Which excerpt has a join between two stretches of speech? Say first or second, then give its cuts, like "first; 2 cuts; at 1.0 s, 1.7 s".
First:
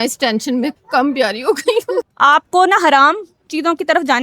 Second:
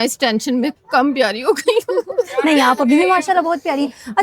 first; 1 cut; at 2.1 s